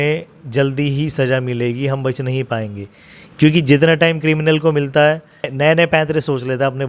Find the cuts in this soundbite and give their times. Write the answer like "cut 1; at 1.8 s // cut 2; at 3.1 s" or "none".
cut 1; at 5.5 s